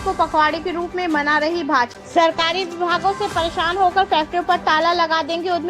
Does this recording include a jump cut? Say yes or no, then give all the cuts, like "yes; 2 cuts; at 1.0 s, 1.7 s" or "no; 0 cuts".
yes; 1 cut; at 1.9 s